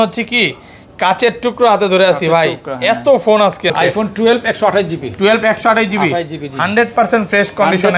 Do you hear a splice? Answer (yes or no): yes